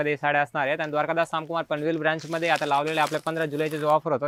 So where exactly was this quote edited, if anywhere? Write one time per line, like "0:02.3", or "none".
none